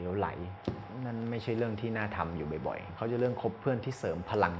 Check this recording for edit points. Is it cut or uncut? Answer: cut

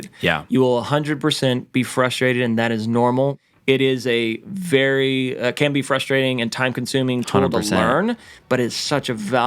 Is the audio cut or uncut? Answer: cut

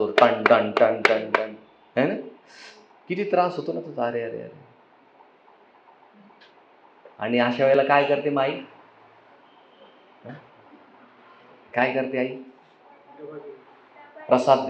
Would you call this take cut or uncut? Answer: uncut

